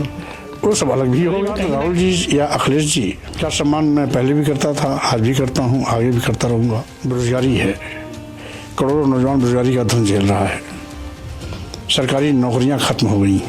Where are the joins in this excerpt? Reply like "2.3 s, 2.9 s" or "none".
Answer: 1.6 s, 3.3 s, 6.9 s